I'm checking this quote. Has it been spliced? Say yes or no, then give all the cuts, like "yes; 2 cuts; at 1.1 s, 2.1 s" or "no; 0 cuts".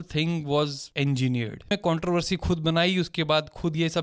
yes; 1 cut; at 1.7 s